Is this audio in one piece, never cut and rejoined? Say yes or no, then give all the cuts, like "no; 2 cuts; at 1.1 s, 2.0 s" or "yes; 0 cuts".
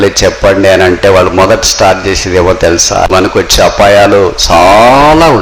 no; 1 cut; at 3.1 s